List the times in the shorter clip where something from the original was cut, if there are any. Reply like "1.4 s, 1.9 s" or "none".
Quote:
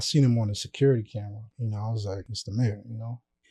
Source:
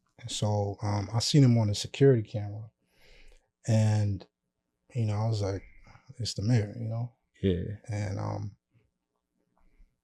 1.4 s, 2.4 s